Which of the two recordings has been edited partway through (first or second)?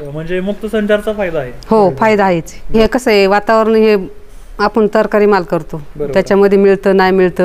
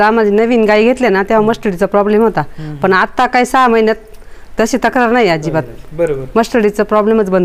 first